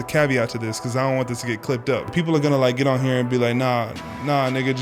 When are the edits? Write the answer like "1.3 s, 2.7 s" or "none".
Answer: 2.1 s